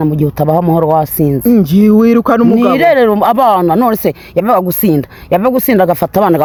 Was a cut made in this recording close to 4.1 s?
no; 0 cuts

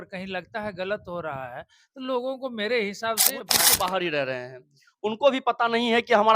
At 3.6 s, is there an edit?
yes; 1 cut; at 3.6 s

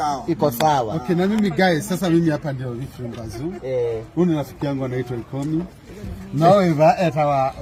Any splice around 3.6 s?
no; 0 cuts

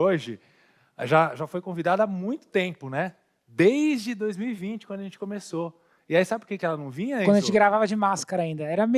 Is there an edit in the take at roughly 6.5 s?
no; 0 cuts

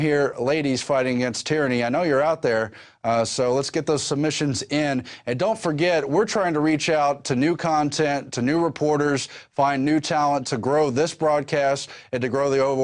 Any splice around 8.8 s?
yes; 1 cut; at 8.8 s

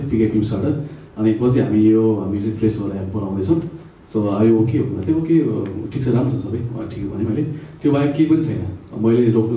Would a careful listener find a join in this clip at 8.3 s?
no; 0 cuts

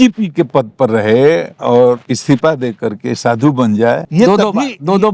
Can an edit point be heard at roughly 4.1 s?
yes; 1 cut; at 4.1 s

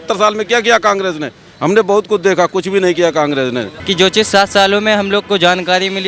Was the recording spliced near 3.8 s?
yes; 1 cut; at 3.8 s

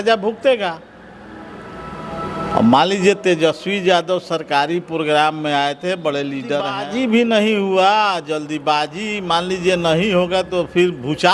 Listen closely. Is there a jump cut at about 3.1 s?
no; 1 cut; at 6.8 s

